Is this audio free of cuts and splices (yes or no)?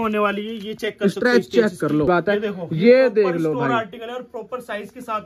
no